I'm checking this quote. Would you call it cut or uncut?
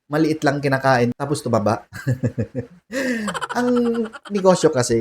cut